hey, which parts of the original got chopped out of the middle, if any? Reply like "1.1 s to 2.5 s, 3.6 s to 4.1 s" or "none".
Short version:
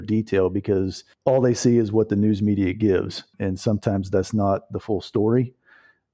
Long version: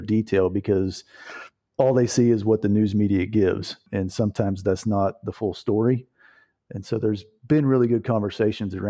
1.0 s to 1.6 s

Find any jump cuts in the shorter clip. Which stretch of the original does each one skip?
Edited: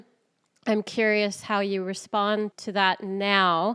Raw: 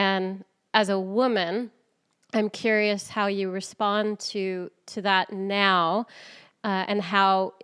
4.2 s to 4.9 s

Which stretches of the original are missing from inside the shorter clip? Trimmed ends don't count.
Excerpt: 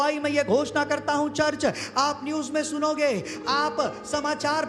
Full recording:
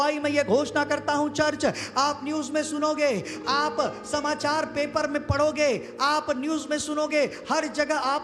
none

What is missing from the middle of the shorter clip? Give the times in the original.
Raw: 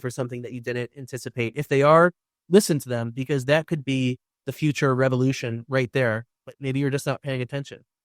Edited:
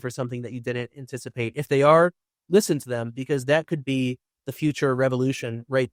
none

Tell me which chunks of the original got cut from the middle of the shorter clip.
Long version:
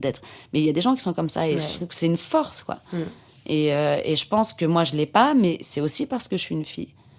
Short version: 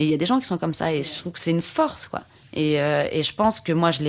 2.9 s to 3.2 s

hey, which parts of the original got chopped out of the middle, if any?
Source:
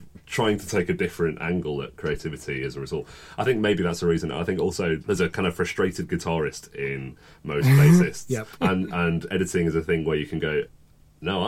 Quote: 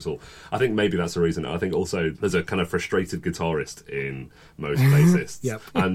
none

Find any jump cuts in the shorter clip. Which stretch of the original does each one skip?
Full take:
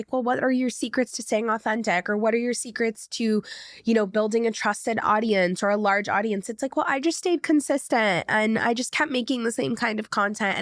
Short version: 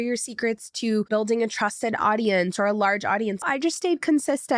3.4 s to 4.1 s, 6.5 s to 6.9 s

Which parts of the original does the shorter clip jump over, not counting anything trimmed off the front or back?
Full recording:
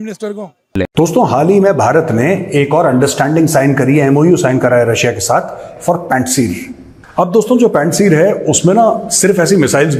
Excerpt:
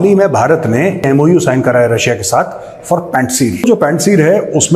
2.5 s to 4.0 s, 6.6 s to 7.6 s

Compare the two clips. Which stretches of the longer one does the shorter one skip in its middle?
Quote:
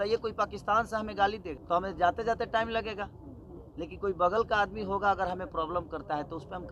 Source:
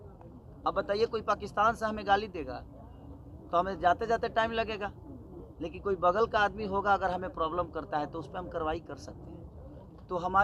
2.4 s to 3.4 s

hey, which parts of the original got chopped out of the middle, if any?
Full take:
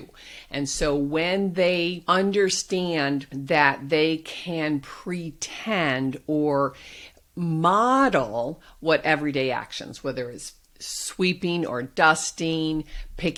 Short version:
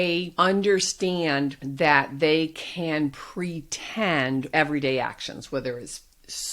6.2 s to 9.0 s

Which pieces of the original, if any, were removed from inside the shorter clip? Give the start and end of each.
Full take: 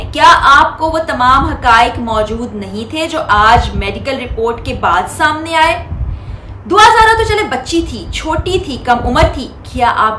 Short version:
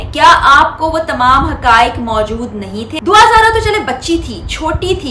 2.8 s to 6.5 s

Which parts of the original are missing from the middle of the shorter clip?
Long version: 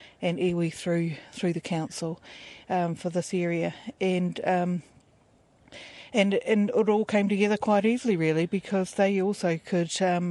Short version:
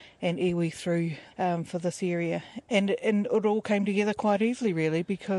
1.2 s to 2.5 s, 3.8 s to 6.0 s

